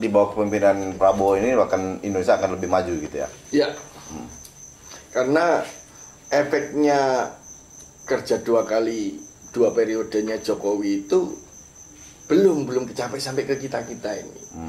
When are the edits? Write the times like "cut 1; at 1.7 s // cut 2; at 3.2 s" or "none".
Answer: none